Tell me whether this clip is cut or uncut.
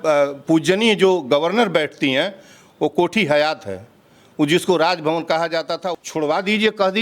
cut